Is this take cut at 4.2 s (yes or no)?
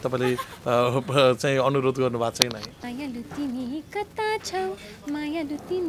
no